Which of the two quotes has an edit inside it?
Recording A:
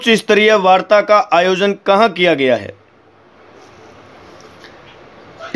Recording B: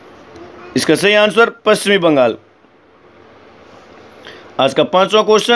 A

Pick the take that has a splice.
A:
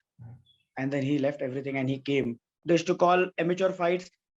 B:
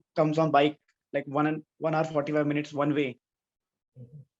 A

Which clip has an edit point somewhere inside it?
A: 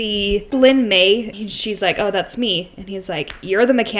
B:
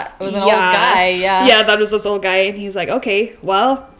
A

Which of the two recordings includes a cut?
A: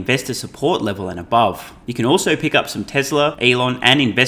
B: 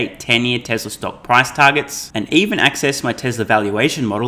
A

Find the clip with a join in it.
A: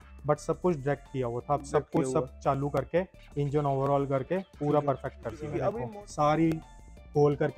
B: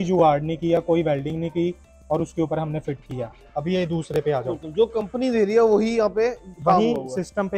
A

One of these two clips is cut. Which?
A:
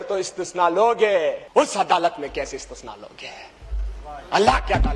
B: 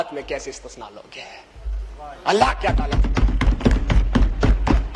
A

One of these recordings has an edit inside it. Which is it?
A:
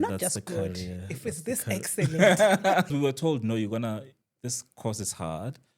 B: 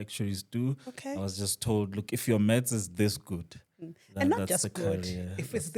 A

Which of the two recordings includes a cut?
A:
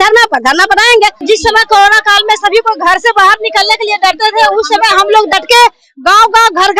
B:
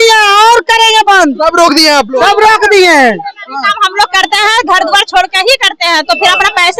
A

